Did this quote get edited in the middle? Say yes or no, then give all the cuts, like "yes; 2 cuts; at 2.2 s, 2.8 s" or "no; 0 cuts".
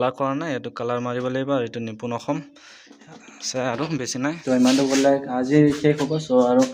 no; 0 cuts